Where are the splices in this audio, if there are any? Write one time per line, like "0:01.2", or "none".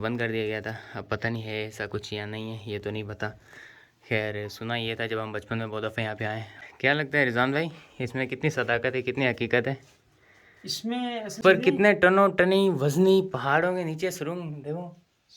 0:06.5
0:11.4